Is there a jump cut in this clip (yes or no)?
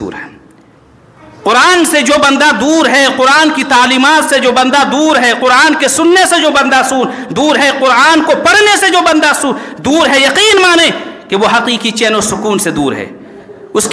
no